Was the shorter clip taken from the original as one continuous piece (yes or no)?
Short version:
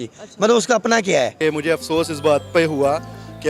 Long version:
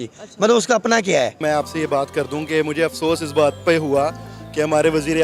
no